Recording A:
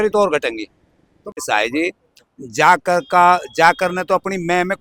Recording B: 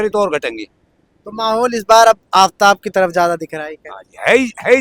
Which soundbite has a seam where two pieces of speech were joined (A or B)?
A